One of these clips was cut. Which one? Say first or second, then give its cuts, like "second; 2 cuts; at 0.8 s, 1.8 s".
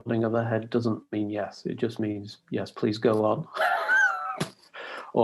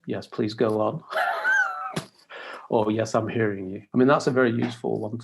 second; 1 cut; at 3.7 s